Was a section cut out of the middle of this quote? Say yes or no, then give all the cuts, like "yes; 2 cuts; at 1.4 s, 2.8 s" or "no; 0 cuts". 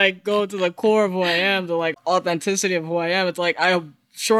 yes; 1 cut; at 1.9 s